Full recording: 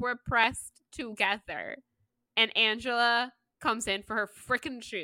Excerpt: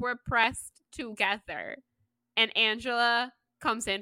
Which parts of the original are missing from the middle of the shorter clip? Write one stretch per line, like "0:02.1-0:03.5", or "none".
none